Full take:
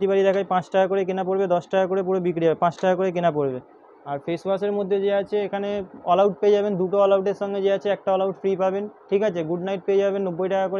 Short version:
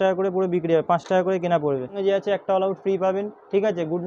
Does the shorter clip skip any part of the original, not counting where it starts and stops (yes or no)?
yes